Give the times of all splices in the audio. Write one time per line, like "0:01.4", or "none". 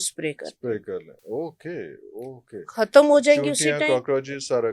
none